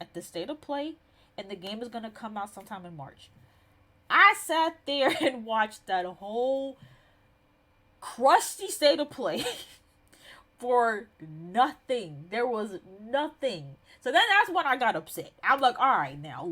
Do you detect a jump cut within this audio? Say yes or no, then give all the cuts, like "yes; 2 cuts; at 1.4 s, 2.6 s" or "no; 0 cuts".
no; 0 cuts